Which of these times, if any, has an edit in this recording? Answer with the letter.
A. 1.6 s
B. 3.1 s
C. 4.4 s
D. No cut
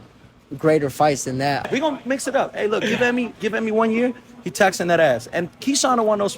A